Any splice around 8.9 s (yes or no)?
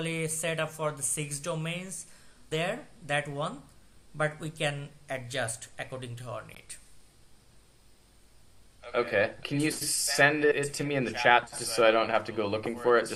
no